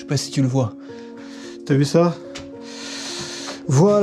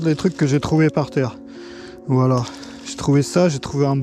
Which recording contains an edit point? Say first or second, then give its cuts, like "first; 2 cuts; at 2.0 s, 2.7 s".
first; 1 cut; at 1.2 s